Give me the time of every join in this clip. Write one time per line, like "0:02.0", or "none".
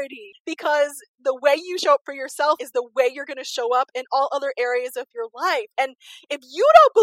0:02.6